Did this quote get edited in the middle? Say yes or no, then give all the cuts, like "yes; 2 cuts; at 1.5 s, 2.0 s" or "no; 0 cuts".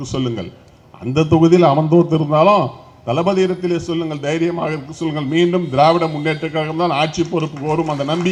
no; 0 cuts